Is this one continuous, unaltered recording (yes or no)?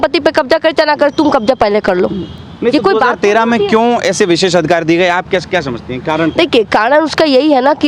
yes